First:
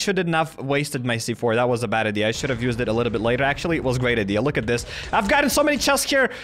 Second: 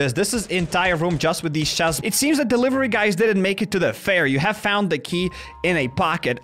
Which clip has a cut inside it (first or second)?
second